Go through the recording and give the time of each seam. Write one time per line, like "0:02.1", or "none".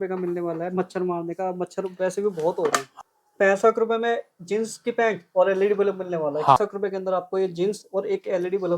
0:02.9
0:06.6